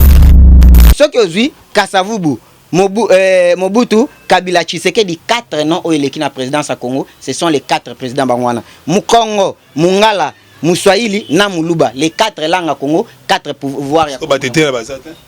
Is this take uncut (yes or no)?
no